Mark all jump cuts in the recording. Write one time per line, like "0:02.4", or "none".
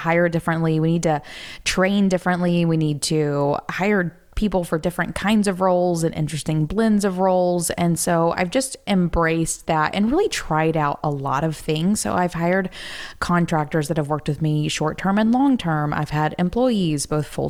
none